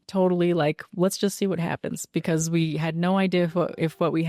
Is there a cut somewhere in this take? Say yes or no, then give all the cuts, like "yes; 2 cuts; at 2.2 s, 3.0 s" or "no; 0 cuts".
no; 0 cuts